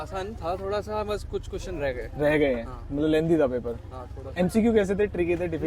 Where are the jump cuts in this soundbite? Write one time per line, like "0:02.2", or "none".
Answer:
none